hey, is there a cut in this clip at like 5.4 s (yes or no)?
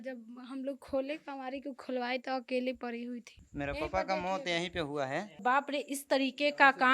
yes